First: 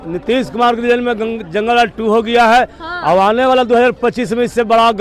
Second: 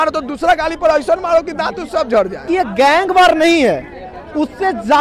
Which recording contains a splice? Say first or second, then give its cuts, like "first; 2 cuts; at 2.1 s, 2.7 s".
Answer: second; 1 cut; at 2.4 s